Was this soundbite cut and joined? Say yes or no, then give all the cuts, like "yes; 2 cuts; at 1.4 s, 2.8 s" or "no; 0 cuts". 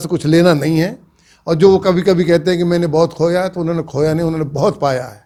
no; 0 cuts